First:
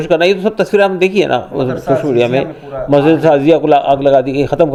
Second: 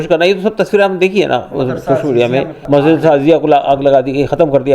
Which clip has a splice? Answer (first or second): second